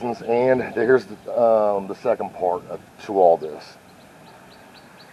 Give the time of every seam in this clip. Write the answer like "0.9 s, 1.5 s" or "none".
none